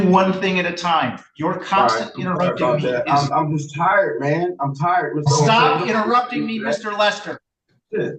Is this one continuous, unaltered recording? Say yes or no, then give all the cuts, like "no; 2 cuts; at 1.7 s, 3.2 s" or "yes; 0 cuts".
yes; 0 cuts